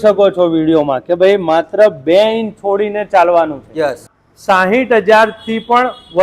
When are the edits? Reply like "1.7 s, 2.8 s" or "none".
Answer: 4.2 s